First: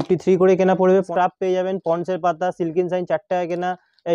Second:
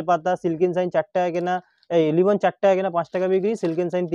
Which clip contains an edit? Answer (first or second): first